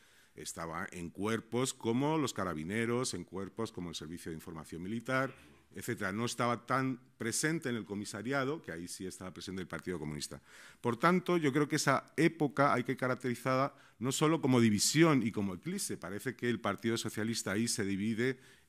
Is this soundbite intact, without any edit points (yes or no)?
no